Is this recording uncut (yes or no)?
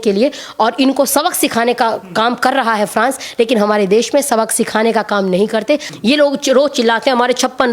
no